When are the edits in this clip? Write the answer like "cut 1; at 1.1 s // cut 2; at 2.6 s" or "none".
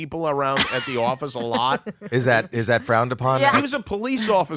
cut 1; at 3.6 s

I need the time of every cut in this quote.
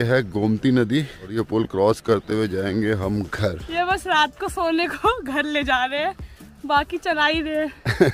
cut 1; at 3.6 s

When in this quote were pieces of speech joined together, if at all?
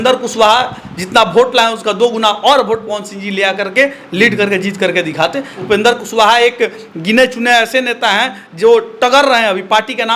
cut 1; at 5.5 s

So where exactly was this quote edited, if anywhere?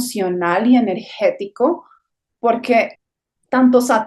cut 1; at 3.0 s

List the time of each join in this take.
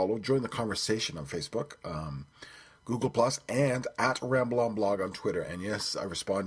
none

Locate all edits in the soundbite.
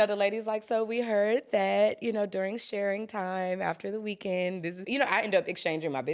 cut 1; at 4.8 s

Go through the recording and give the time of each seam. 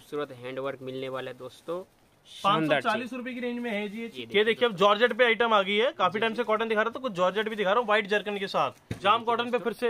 cut 1; at 4.2 s // cut 2; at 8.8 s

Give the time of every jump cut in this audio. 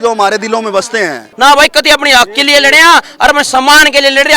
cut 1; at 1.2 s

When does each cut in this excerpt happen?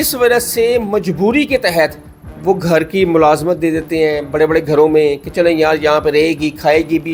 none

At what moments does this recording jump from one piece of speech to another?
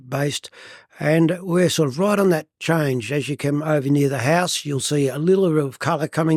none

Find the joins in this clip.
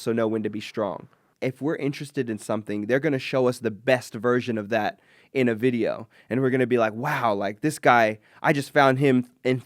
cut 1; at 1.3 s

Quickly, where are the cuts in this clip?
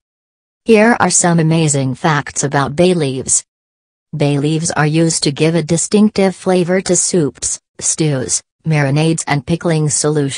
none

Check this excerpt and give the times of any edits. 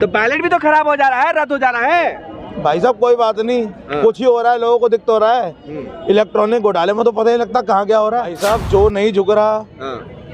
cut 1; at 8.4 s

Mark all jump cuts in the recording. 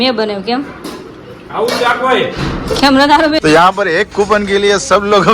cut 1; at 3.4 s

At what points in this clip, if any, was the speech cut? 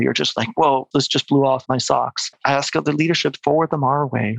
cut 1; at 0.9 s // cut 2; at 2.0 s

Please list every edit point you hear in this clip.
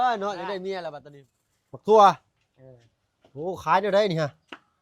cut 1; at 0.9 s

